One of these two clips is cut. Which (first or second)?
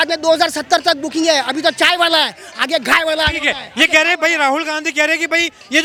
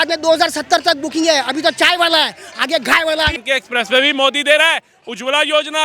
second